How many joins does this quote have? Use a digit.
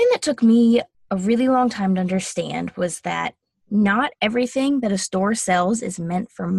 1